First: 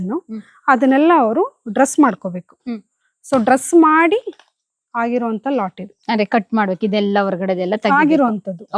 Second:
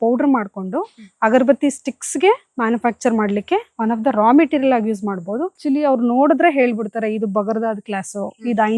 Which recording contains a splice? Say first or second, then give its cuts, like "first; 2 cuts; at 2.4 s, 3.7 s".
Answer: second; 1 cut; at 5.6 s